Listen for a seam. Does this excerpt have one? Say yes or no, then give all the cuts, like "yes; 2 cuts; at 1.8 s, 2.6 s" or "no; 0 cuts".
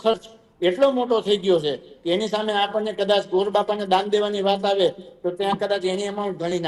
no; 0 cuts